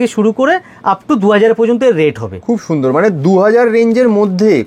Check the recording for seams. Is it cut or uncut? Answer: uncut